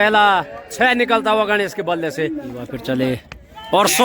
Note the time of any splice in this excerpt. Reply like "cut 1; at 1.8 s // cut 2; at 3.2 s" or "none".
cut 1; at 2.7 s